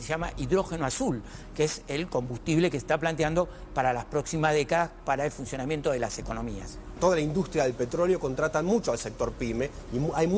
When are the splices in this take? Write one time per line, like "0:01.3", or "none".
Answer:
0:06.9